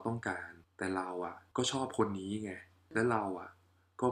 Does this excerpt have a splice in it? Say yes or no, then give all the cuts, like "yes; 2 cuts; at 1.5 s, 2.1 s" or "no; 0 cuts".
no; 0 cuts